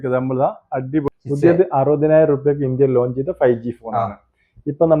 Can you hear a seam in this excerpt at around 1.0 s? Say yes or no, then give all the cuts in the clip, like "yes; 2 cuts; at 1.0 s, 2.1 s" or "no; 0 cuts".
yes; 1 cut; at 1.0 s